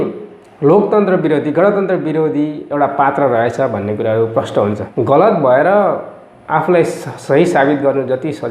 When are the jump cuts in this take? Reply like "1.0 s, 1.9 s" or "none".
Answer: 4.9 s